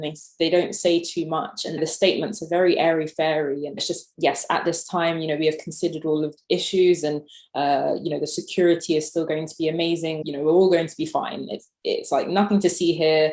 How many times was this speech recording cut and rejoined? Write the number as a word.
four